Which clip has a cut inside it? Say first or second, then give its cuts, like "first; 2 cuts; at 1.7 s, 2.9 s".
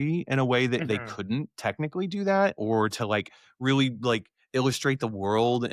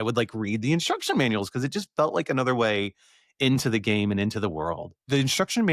second; 1 cut; at 4.6 s